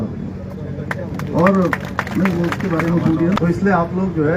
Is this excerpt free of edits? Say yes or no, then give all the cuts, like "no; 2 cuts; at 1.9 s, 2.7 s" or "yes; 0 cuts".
no; 1 cut; at 3.4 s